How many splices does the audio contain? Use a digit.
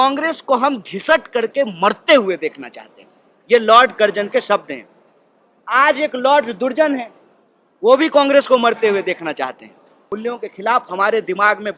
1